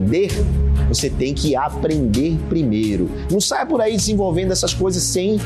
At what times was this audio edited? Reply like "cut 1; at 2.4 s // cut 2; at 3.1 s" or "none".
none